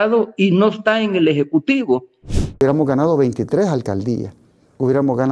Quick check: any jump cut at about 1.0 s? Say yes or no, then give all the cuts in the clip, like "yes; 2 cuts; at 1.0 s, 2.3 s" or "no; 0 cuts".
no; 1 cut; at 2.6 s